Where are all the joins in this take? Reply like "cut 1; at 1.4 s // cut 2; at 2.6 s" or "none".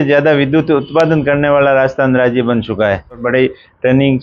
cut 1; at 3.2 s